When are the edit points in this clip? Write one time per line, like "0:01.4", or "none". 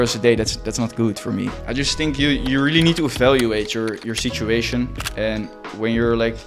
0:01.5